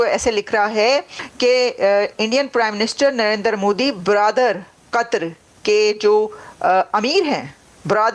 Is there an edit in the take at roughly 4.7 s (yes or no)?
no